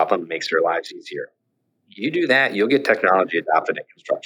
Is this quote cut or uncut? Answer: uncut